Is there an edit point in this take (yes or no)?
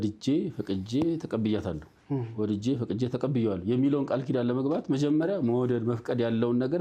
no